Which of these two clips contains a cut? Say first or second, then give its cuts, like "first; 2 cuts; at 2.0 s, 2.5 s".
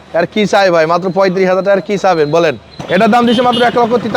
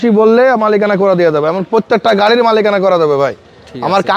first; 1 cut; at 2.7 s